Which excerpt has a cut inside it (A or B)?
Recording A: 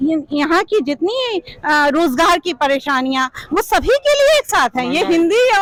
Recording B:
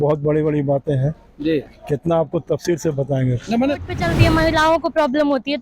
B